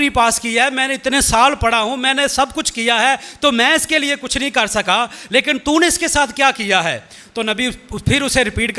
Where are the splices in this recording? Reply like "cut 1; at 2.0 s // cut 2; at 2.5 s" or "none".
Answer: none